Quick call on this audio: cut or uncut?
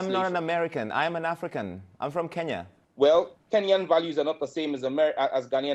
cut